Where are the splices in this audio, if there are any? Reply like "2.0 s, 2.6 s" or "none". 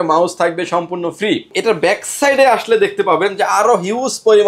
1.5 s